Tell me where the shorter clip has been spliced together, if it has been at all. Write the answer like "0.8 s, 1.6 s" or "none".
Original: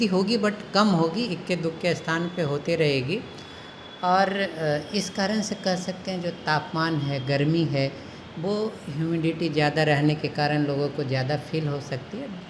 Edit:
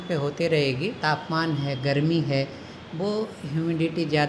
1.0 s